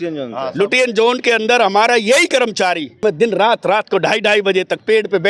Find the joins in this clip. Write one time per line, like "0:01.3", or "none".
0:03.0